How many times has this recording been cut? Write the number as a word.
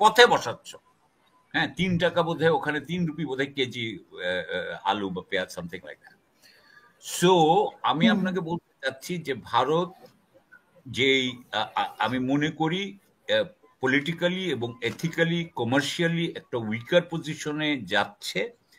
zero